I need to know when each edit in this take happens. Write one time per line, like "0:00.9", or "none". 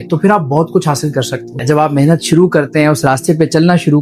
0:01.5